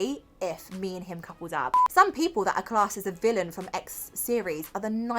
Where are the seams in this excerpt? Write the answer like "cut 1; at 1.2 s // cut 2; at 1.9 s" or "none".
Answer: cut 1; at 1.8 s

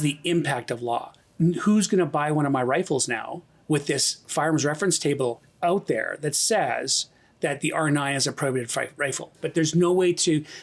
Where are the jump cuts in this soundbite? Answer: cut 1; at 1.2 s // cut 2; at 5.5 s // cut 3; at 9.4 s

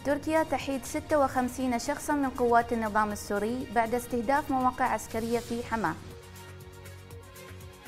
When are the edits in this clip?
cut 1; at 6.4 s

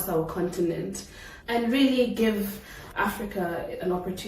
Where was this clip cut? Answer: cut 1; at 2.9 s

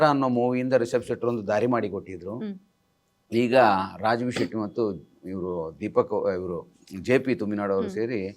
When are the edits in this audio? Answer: none

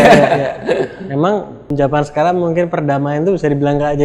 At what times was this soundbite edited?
cut 1; at 1.7 s

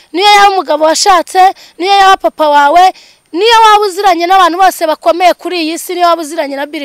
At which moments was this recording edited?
none

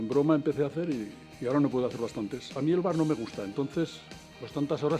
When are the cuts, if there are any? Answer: cut 1; at 2.4 s

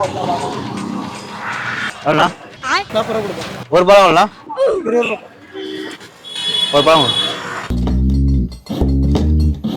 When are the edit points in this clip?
cut 1; at 7.7 s

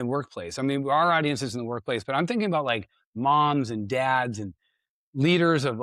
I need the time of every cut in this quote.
none

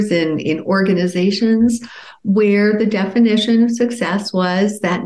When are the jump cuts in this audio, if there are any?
none

